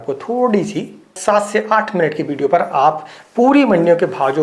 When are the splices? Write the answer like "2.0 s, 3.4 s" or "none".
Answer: 1.1 s

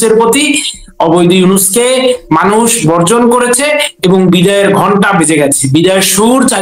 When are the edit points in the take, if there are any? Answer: none

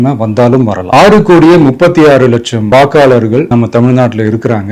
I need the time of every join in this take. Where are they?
0.8 s, 2.6 s

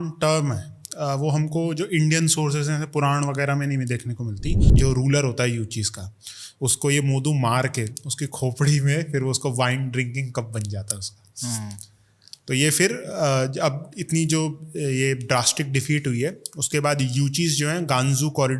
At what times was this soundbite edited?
4.7 s

